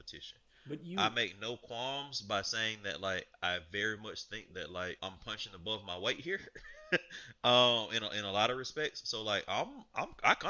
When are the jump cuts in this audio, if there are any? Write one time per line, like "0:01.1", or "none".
0:05.0